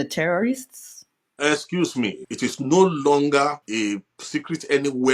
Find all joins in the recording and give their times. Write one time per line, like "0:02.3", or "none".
0:02.2
0:03.6